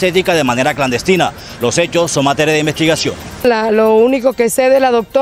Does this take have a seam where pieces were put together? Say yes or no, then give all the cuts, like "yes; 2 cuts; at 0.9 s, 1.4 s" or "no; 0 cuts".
yes; 1 cut; at 3.4 s